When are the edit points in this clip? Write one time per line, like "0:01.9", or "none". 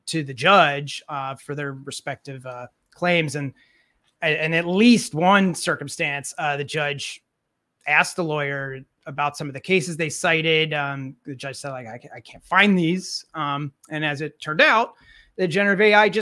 none